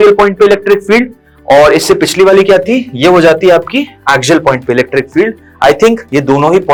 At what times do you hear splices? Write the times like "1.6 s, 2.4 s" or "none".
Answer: none